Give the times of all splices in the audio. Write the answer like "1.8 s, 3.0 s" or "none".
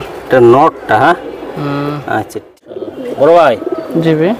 2.6 s